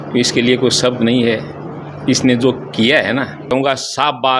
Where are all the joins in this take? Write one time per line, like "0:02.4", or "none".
0:03.5